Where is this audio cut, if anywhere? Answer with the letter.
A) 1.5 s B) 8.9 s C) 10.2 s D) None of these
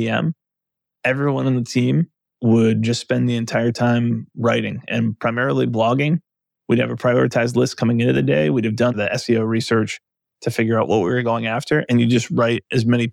B